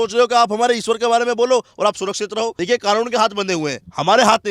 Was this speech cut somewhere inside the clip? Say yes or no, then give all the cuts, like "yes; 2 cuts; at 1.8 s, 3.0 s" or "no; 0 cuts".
yes; 1 cut; at 2.6 s